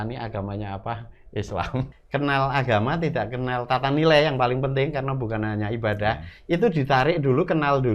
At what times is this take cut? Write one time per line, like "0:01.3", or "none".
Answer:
0:01.9